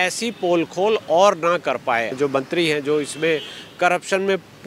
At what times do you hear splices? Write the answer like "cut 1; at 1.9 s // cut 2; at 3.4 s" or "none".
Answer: cut 1; at 2.1 s